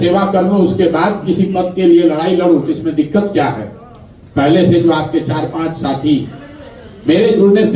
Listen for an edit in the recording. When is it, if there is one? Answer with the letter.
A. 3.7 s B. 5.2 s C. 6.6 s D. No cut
D